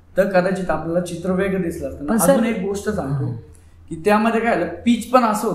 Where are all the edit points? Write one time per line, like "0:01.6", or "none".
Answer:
none